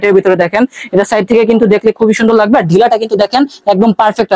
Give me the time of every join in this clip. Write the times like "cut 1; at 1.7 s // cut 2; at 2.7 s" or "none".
none